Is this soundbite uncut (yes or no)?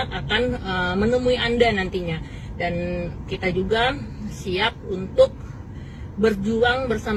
yes